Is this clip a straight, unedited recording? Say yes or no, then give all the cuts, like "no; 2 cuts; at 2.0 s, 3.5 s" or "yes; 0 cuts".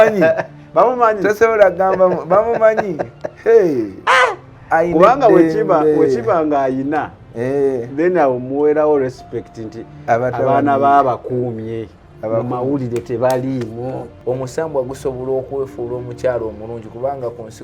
no; 1 cut; at 14.1 s